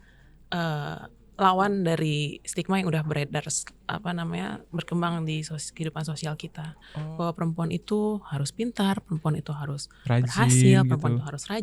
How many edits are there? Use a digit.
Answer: 1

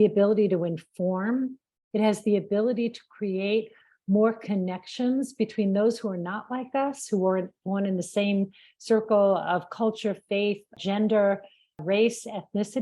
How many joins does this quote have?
1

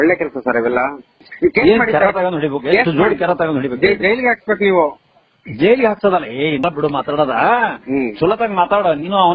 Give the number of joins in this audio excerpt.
2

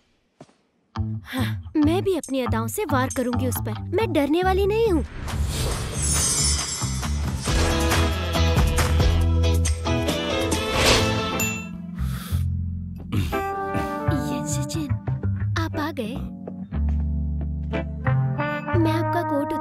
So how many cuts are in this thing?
3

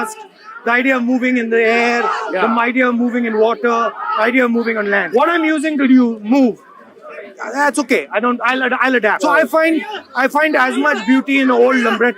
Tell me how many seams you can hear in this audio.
2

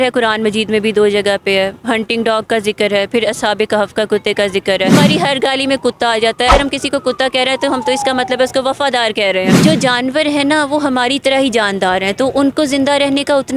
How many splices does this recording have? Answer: 3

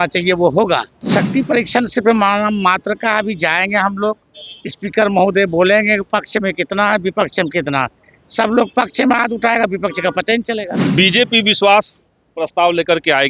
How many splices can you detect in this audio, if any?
2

